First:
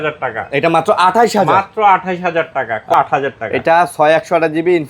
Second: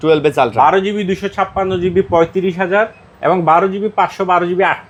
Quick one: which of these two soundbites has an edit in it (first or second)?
first